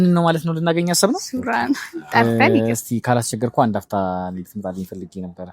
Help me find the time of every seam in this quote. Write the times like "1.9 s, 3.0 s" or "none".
2.2 s